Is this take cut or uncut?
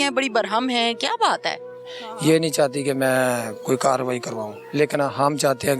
cut